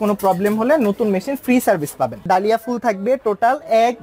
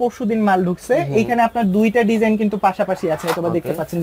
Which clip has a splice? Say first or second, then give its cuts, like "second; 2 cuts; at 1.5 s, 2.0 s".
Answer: first; 1 cut; at 2.2 s